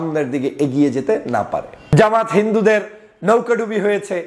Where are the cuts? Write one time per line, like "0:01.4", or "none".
0:01.2